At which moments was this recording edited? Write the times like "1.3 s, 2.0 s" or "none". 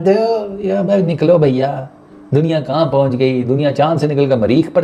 none